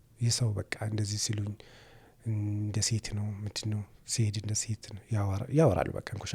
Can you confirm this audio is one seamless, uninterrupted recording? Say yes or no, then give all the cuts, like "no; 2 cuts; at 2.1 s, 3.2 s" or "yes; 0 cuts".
yes; 0 cuts